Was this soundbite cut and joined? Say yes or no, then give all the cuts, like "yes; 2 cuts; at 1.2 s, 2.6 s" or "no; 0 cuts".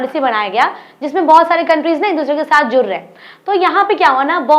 no; 0 cuts